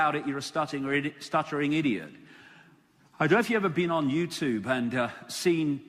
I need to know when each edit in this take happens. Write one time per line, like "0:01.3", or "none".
0:04.0